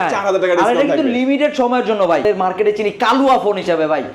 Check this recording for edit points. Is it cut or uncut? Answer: cut